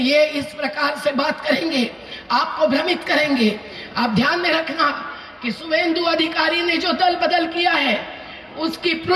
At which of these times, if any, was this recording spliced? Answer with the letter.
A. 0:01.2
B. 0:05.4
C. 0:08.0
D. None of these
D